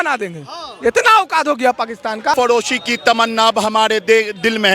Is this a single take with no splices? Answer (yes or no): no